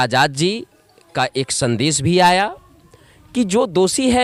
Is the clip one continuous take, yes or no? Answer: yes